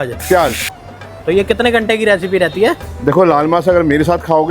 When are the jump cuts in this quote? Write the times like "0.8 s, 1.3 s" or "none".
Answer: 0.9 s